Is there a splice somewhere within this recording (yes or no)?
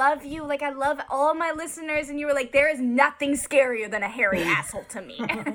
no